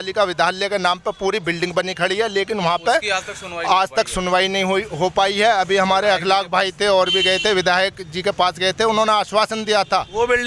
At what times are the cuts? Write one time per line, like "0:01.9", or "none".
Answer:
none